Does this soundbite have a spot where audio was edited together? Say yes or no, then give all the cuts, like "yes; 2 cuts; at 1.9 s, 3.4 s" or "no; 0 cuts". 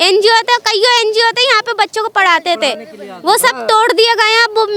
no; 0 cuts